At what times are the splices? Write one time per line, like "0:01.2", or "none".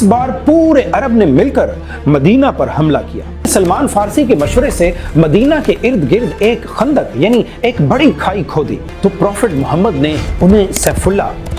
0:03.5
0:08.9